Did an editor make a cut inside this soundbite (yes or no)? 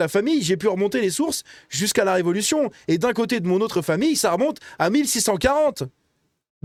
no